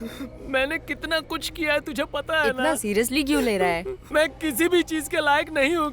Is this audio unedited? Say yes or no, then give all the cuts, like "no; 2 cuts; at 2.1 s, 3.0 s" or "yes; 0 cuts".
no; 1 cut; at 4.0 s